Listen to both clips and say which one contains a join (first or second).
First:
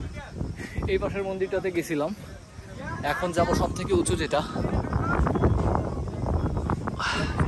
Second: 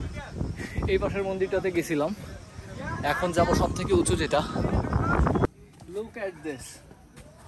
second